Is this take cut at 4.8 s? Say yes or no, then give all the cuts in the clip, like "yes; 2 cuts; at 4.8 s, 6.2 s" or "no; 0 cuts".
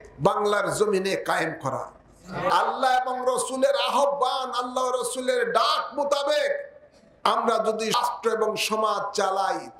no; 2 cuts; at 2.5 s, 8.0 s